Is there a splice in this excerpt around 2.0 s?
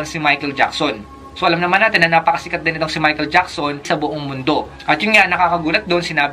no; 1 cut; at 4.7 s

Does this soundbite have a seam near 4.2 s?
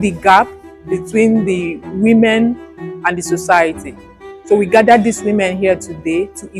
no; 0 cuts

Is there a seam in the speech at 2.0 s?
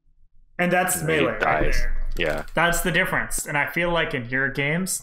no; 1 cut; at 3.3 s

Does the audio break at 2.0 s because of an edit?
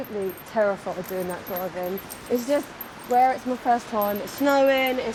no; 0 cuts

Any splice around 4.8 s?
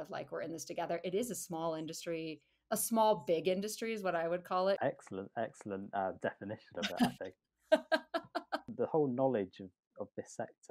yes; 2 cuts; at 4.8 s, 8.7 s

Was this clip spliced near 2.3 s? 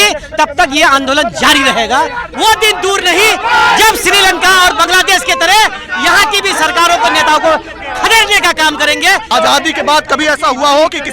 yes; 2 cuts; at 2.3 s, 9.3 s

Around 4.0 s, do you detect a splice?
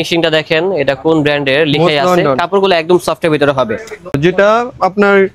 yes; 1 cut; at 4.0 s

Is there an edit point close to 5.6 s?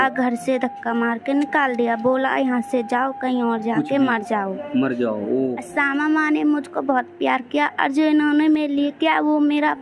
yes; 1 cut; at 5.6 s

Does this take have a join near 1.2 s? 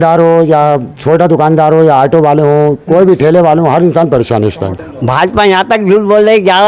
no; 1 cut; at 4.7 s

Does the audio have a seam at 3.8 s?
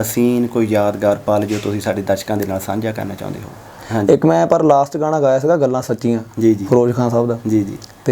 yes; 1 cut; at 3.8 s

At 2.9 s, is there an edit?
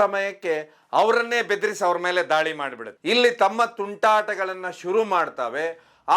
yes; 1 cut; at 2.9 s

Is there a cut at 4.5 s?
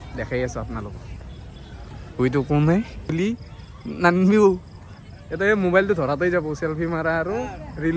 no; 1 cut; at 3.1 s

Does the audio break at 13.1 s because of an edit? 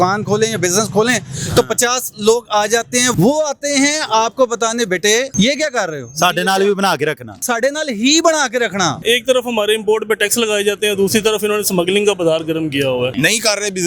yes; 5 cuts; at 3.1 s, 5.3 s, 7.4 s, 9.0 s, 13.1 s

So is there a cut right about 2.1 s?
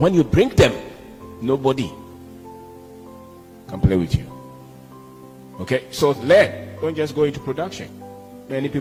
no; 0 cuts

